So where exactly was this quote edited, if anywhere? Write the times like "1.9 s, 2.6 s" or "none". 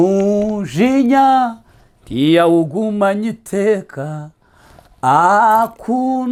none